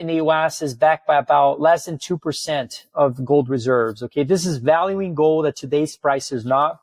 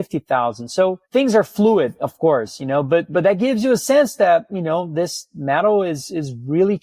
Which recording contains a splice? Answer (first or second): second